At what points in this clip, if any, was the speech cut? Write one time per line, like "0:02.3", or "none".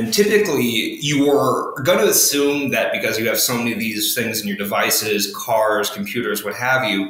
none